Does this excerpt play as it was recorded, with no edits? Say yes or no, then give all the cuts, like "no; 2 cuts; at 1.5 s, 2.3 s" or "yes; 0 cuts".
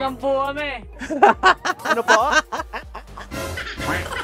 yes; 0 cuts